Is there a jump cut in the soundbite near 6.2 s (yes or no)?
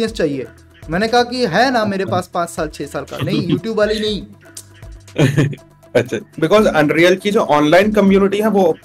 yes